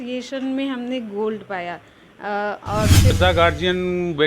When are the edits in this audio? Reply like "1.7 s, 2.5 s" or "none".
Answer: 3.1 s